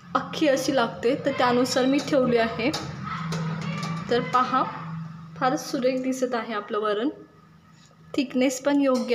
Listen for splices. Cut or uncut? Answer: uncut